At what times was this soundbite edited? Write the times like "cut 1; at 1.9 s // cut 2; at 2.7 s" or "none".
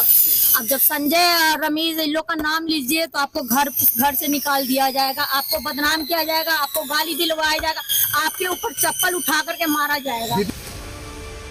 cut 1; at 10.6 s